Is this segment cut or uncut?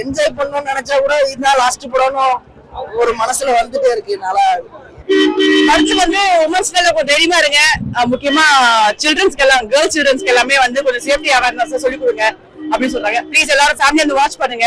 uncut